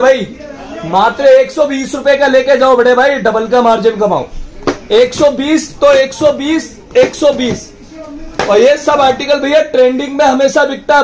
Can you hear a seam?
no; 0 cuts

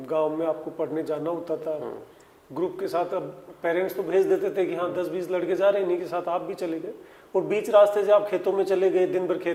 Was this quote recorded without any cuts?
yes; 0 cuts

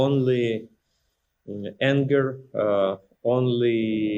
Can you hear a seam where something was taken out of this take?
no; 0 cuts

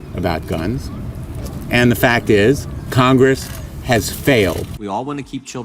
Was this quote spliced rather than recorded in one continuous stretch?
yes; 1 cut; at 4.7 s

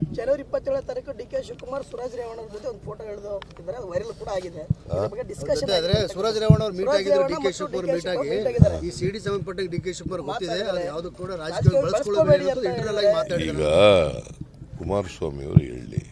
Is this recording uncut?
yes; 0 cuts

